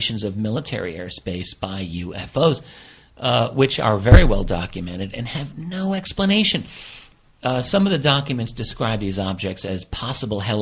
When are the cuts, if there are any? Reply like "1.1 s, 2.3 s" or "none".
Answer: 7.6 s